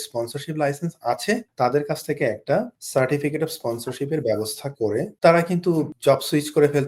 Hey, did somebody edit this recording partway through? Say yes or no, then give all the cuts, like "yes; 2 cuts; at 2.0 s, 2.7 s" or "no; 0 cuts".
yes; 4 cuts; at 1.5 s, 2.8 s, 5.1 s, 5.9 s